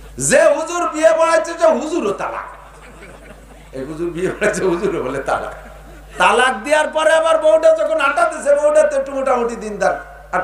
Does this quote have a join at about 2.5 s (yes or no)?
no